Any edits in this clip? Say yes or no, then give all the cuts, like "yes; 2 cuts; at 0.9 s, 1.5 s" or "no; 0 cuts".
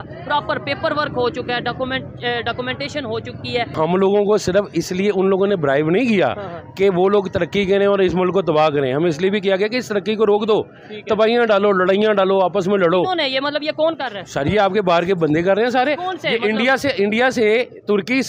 yes; 1 cut; at 3.7 s